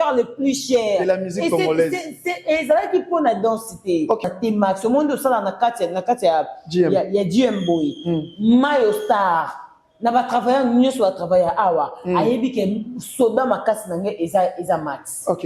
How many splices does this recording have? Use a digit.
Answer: 1